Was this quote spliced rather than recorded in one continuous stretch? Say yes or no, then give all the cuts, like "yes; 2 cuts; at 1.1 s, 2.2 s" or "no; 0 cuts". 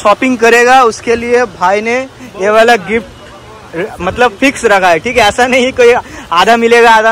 no; 0 cuts